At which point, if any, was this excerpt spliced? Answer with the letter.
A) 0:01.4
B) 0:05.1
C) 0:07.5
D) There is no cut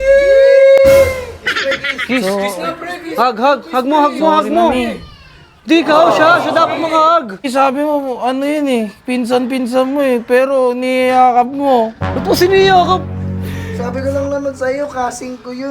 C